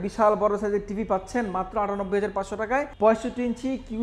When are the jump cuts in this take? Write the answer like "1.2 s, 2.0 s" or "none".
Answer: 2.9 s